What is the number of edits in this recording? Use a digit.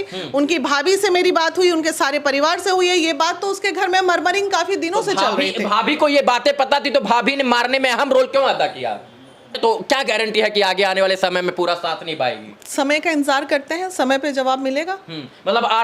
1